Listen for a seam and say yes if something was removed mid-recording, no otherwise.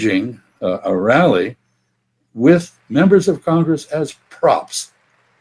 no